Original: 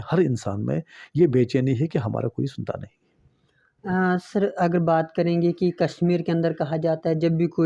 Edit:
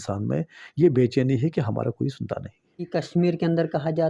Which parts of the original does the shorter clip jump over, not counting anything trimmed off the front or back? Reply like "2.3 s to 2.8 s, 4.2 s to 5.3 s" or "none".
3.3 s to 5.7 s